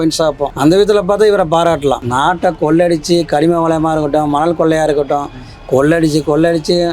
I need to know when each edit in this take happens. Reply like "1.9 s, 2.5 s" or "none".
2.0 s